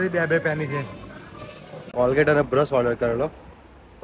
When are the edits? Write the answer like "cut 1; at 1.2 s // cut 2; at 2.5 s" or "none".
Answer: cut 1; at 1.9 s